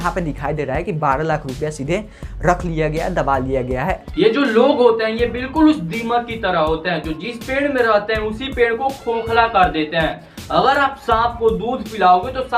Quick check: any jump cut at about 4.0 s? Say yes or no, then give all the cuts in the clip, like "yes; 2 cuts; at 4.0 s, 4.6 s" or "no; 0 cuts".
yes; 1 cut; at 4.0 s